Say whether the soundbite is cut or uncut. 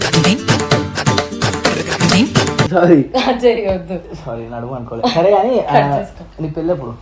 uncut